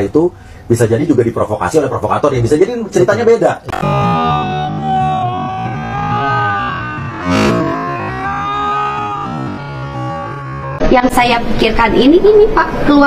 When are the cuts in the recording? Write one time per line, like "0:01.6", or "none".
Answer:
0:03.7
0:10.8